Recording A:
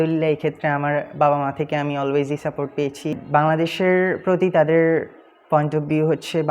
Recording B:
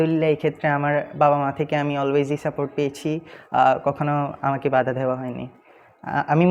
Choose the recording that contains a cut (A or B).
A